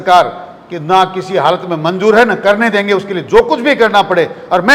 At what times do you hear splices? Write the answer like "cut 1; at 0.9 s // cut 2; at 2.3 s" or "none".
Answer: none